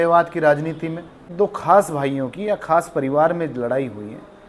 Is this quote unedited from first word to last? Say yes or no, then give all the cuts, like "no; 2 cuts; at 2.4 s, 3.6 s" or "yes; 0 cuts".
no; 1 cut; at 1.2 s